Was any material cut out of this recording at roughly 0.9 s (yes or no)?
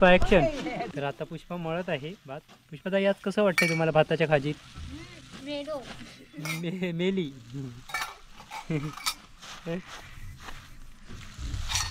yes